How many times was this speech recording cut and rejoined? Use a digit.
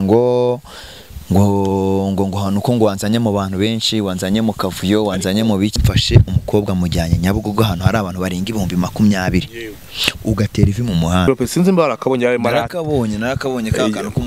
2